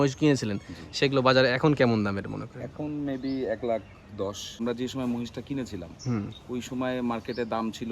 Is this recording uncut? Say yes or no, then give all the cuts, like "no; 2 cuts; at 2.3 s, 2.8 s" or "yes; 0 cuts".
no; 1 cut; at 4.6 s